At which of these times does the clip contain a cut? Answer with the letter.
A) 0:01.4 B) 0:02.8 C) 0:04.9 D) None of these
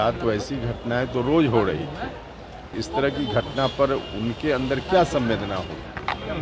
B